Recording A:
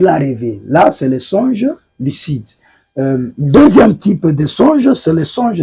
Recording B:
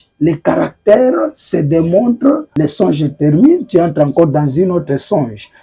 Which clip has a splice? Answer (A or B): B